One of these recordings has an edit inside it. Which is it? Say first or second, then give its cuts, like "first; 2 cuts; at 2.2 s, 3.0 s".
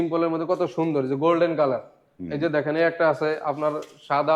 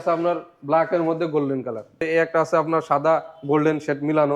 second; 1 cut; at 2.0 s